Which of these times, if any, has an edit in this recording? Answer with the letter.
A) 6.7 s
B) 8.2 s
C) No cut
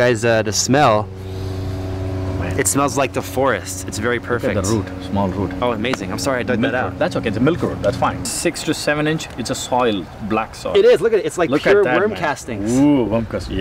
B